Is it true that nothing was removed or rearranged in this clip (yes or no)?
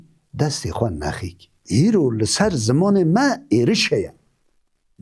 no